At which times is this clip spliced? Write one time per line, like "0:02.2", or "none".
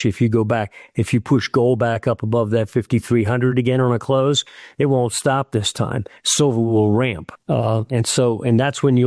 none